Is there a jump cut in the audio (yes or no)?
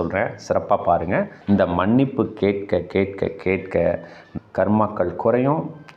yes